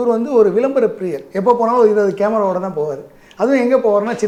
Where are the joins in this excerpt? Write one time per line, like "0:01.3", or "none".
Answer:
none